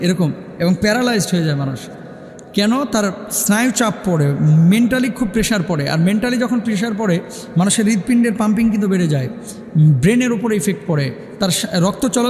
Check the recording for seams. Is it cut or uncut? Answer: uncut